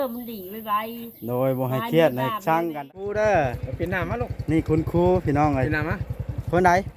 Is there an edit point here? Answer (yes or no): yes